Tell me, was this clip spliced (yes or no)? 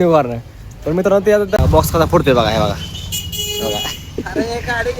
yes